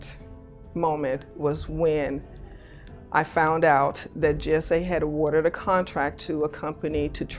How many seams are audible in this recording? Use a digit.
0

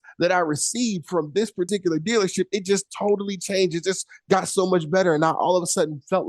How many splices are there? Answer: 1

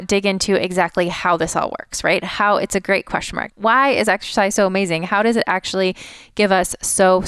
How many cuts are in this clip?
1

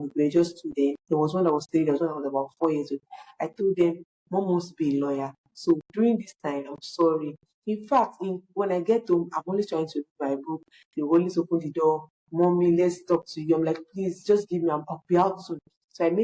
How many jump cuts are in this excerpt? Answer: 1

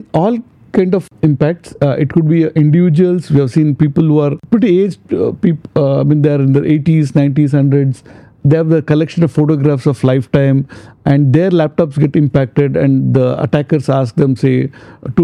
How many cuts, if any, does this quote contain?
2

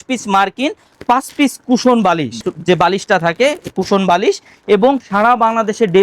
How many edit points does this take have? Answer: 0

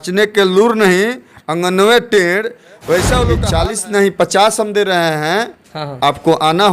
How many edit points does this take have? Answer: 1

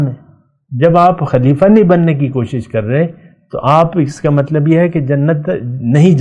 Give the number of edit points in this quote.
0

